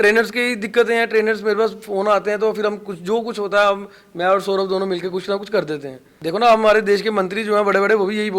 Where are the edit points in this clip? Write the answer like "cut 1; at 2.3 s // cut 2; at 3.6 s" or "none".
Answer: cut 1; at 6.1 s